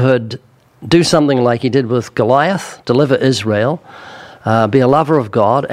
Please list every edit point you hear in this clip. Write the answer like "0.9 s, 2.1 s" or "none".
none